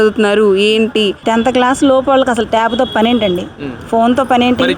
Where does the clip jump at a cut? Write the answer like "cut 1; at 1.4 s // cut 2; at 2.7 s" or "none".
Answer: cut 1; at 1.2 s

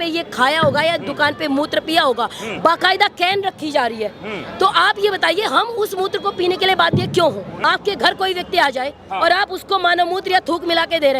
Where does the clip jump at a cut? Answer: cut 1; at 7.5 s

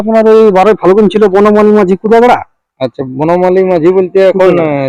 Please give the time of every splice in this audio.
none

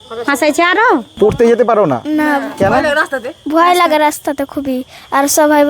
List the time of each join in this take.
cut 1; at 1.1 s

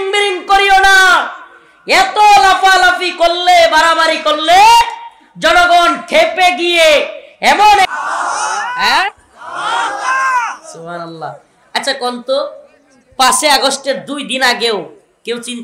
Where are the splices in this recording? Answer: cut 1; at 8.0 s

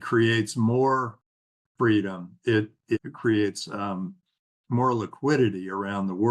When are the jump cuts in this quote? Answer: cut 1; at 3.0 s

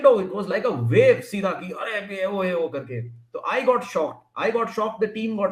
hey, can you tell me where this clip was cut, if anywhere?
none

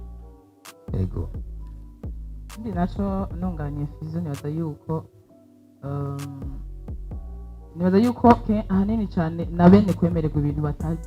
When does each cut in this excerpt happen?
none

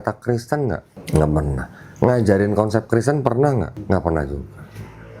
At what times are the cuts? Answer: cut 1; at 0.9 s // cut 2; at 3.8 s

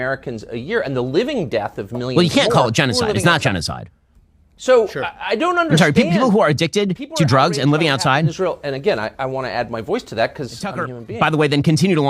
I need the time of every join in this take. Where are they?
cut 1; at 10.9 s

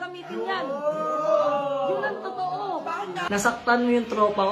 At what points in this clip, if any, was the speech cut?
cut 1; at 3.3 s

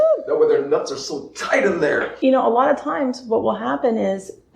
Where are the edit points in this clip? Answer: cut 1; at 2.1 s

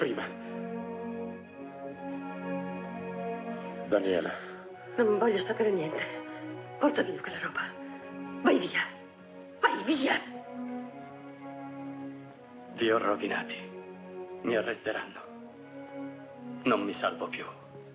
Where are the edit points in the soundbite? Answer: cut 1; at 16.0 s

